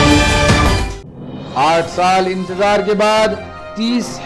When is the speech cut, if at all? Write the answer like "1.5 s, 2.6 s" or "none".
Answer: 0.9 s